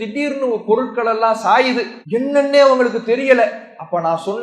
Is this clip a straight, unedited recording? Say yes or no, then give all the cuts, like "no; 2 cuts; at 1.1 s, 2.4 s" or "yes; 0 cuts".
no; 1 cut; at 1.9 s